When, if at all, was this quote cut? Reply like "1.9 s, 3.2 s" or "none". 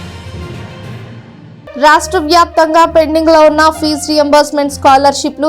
1.6 s